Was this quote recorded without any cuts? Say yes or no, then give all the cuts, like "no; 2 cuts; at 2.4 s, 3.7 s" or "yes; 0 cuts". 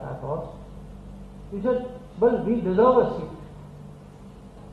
yes; 0 cuts